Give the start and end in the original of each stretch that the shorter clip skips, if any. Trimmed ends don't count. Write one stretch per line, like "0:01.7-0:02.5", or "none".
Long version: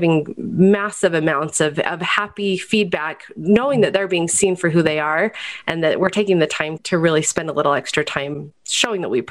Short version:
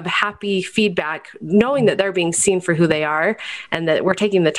none